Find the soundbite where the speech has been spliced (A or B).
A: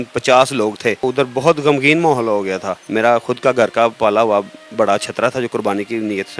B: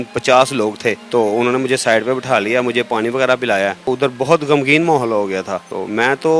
A